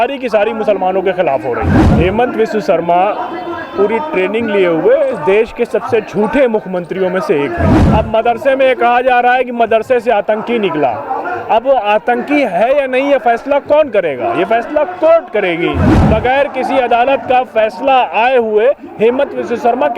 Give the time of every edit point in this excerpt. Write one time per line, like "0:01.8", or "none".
0:01.8
0:07.8
0:15.9